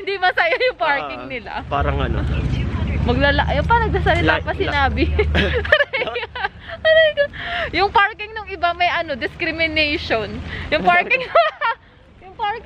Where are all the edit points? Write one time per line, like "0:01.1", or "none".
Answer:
0:01.7

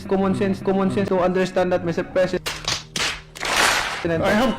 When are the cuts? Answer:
0:01.1

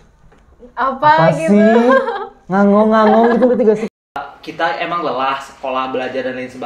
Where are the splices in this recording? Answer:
0:03.9

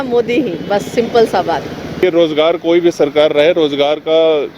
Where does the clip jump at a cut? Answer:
0:02.0

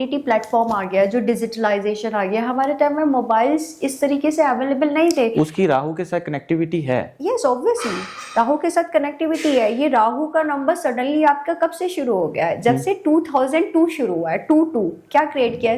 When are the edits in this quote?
none

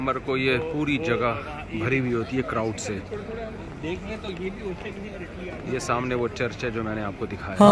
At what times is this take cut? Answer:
none

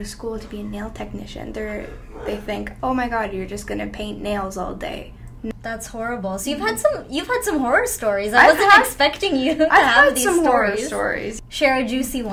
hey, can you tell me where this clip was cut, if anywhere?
0:05.5
0:11.3

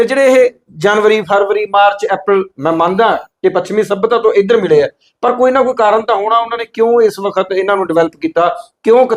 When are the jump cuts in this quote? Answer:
none

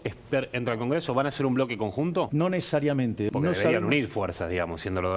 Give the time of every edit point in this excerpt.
0:02.3
0:03.3

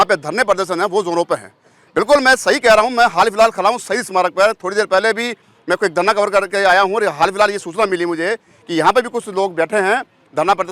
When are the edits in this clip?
none

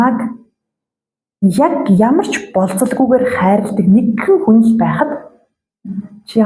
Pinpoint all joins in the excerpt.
none

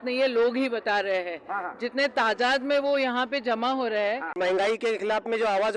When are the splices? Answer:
0:04.3

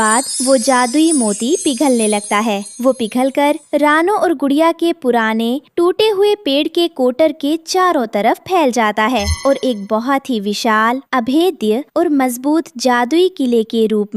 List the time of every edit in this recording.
none

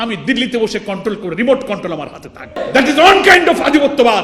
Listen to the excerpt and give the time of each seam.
0:02.6

